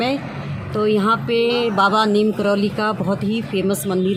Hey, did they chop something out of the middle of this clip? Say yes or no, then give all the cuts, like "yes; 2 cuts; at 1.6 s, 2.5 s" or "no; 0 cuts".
no; 0 cuts